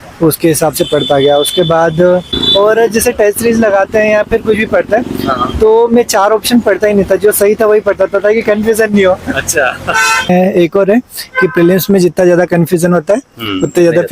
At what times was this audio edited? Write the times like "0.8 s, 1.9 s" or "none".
2.4 s, 10.3 s